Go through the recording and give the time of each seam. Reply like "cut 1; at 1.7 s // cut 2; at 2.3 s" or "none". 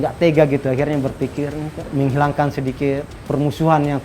cut 1; at 1.9 s // cut 2; at 3.1 s